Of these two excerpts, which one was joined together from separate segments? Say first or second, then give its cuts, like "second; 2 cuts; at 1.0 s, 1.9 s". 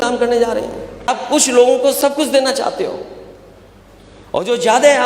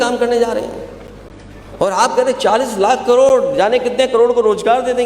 first; 1 cut; at 1.1 s